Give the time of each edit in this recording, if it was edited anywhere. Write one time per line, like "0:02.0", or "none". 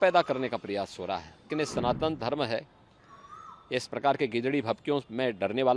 0:01.4